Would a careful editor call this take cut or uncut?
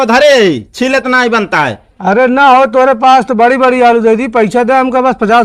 uncut